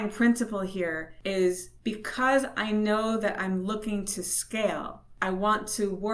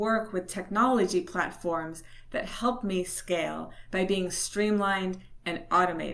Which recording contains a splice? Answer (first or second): first